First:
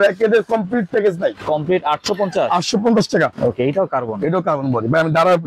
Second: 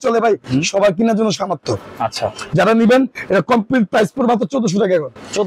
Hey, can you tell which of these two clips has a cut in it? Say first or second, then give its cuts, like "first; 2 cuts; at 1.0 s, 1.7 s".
first; 2 cuts; at 1.4 s, 3.3 s